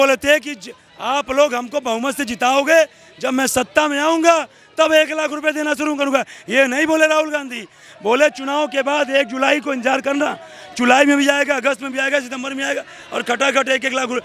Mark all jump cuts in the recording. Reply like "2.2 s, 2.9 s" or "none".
none